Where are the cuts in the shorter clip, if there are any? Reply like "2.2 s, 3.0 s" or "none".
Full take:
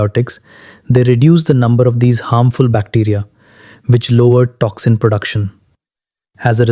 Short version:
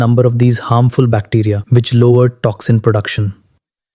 1.6 s